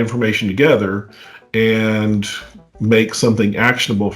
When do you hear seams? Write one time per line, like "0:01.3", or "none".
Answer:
none